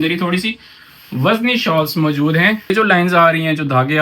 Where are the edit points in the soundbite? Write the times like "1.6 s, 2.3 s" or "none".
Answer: 2.7 s